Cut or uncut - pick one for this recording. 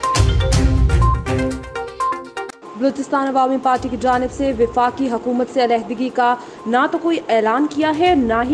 cut